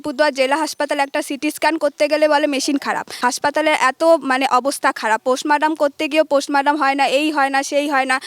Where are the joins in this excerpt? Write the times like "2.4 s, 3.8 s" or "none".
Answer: 3.1 s

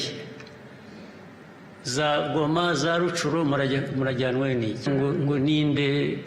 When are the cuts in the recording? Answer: 4.9 s

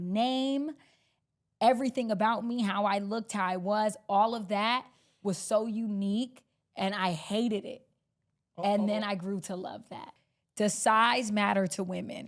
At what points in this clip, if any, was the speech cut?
10.1 s

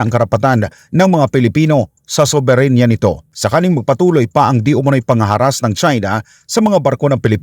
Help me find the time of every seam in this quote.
3.3 s

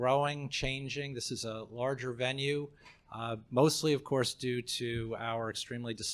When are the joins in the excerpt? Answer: 3.8 s

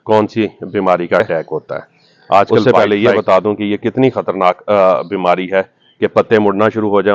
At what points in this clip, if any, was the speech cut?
2.6 s

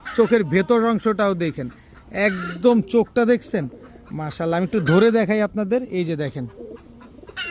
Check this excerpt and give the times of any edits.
none

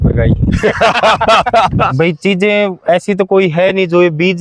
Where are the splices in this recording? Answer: 1.9 s

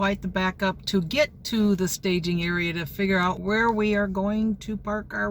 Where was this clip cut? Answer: 3.4 s

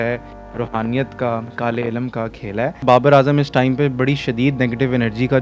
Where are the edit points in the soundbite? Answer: 2.8 s

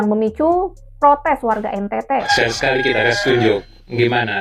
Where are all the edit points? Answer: 2.3 s

